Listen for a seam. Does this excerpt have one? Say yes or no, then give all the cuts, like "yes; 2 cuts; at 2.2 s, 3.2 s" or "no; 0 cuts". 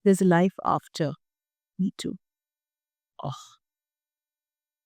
no; 0 cuts